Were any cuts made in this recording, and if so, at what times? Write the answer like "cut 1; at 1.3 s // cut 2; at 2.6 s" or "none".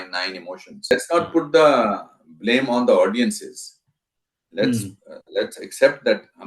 cut 1; at 0.9 s